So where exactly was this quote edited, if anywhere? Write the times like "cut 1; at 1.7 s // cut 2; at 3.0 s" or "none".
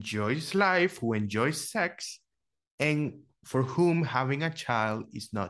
none